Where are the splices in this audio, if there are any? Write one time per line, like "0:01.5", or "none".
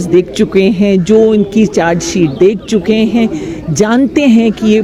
none